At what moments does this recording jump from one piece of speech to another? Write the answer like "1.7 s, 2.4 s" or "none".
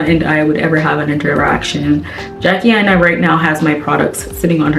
none